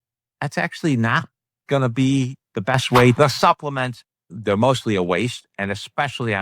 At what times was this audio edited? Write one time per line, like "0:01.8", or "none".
0:03.1
0:04.3